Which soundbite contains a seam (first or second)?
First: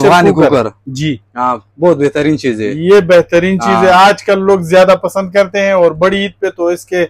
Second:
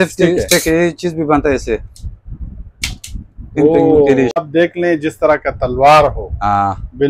second